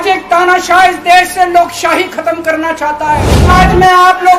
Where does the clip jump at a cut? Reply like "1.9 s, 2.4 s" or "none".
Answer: 3.5 s